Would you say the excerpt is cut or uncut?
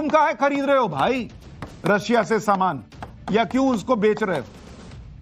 uncut